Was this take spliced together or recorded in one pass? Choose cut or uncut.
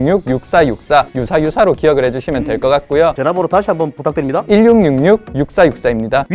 cut